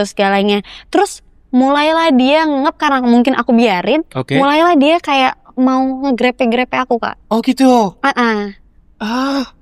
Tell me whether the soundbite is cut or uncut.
uncut